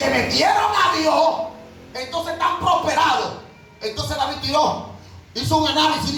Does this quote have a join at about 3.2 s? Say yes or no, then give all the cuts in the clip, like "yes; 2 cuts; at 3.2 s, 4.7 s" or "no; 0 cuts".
no; 0 cuts